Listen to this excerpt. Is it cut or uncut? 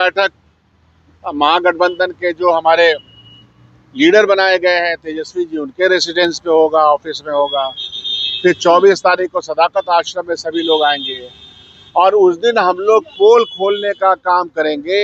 uncut